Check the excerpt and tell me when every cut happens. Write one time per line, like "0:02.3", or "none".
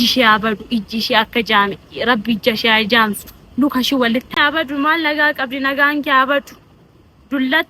0:04.4